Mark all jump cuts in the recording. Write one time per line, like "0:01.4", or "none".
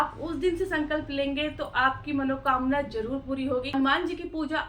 0:03.7